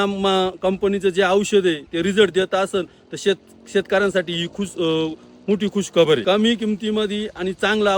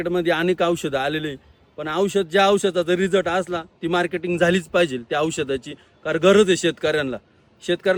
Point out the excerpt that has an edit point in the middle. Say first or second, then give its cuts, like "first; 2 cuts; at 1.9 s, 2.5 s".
first; 1 cut; at 6.2 s